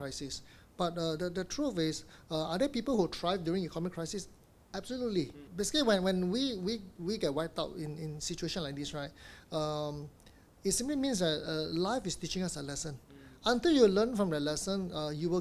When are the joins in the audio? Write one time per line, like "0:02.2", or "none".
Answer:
0:05.5